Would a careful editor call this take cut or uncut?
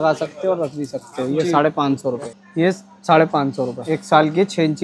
cut